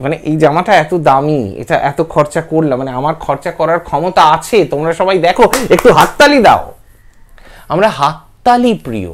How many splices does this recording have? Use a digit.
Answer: 0